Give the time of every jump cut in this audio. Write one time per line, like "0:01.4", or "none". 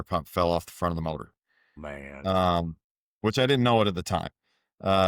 none